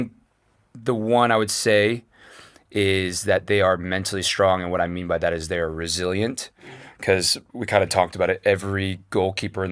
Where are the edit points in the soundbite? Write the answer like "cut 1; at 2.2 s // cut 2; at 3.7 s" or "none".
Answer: none